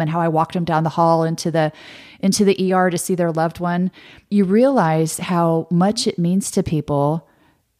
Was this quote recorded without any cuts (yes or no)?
yes